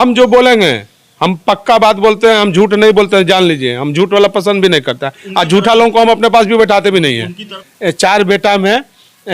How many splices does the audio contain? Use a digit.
1